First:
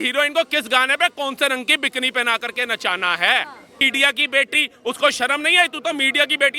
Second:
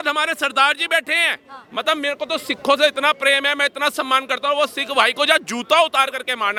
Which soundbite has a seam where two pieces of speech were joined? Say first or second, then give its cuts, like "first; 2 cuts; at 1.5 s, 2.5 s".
first; 1 cut; at 3.9 s